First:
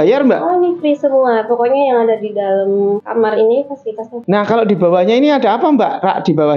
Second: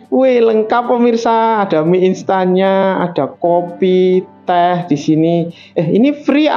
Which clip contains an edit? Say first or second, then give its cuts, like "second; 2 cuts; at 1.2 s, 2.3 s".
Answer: first; 2 cuts; at 3.0 s, 4.2 s